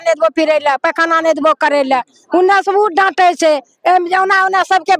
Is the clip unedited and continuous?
yes; 0 cuts

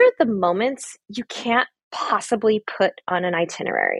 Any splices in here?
no; 0 cuts

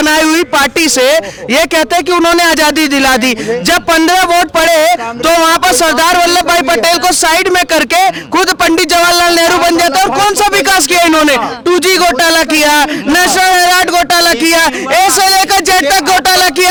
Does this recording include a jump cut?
no; 0 cuts

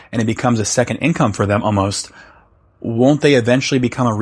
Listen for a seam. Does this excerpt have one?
no; 0 cuts

